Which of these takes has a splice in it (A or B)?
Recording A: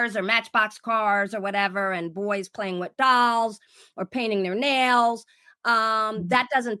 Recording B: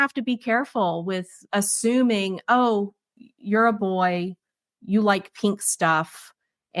B